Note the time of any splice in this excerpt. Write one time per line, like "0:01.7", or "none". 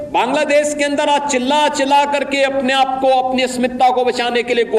none